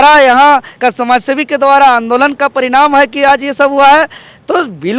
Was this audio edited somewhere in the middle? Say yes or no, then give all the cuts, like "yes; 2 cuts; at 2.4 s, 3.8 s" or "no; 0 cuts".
no; 0 cuts